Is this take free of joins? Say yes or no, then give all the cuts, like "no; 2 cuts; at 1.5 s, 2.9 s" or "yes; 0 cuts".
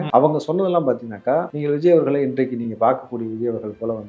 no; 1 cut; at 1.5 s